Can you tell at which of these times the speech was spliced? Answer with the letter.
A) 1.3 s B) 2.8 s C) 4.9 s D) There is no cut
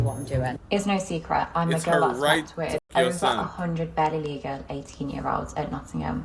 B